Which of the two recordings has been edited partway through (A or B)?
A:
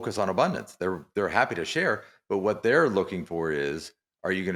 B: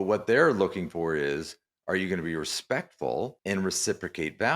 B